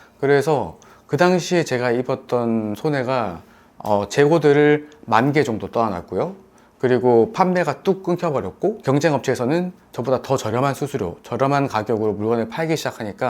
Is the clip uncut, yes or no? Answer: no